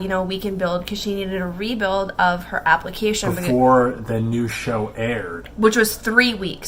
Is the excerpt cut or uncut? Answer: uncut